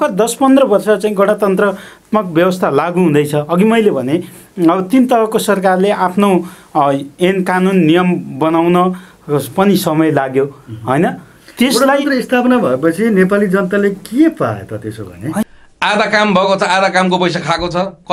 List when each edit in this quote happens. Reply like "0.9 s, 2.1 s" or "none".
15.4 s